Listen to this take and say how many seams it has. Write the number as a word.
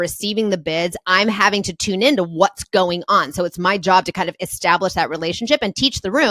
zero